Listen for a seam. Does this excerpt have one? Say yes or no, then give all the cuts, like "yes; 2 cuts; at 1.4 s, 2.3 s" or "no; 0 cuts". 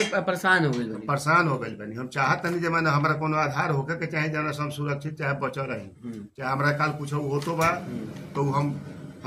no; 0 cuts